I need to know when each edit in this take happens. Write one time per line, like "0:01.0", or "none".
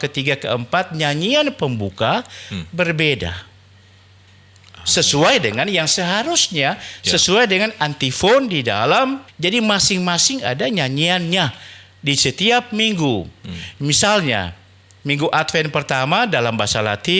0:09.3